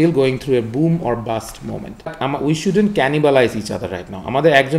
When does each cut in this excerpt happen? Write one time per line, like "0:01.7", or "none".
0:02.1